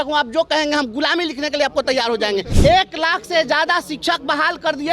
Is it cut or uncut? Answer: cut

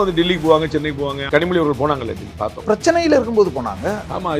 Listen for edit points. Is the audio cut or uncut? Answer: cut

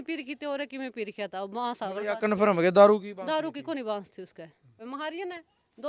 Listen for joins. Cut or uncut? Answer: cut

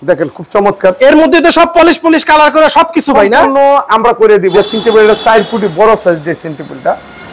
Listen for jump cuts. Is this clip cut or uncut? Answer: cut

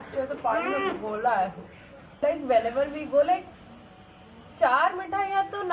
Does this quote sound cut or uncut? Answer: uncut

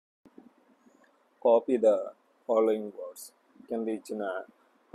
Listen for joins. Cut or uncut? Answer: uncut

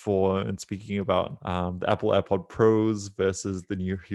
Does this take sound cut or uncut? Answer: cut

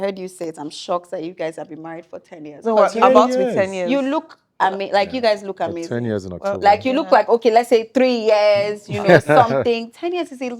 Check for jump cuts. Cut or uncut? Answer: uncut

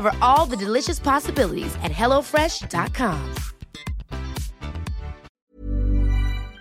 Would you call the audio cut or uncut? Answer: cut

